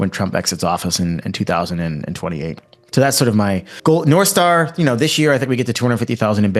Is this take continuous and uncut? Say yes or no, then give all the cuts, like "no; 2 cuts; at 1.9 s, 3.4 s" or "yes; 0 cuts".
no; 1 cut; at 3.7 s